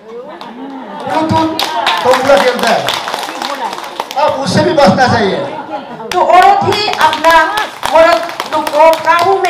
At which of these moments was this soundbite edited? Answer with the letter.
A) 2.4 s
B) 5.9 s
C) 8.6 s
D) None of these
B